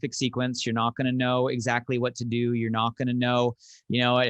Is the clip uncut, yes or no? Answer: yes